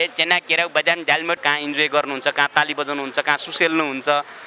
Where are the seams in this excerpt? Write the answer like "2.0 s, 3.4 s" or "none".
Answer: 1.4 s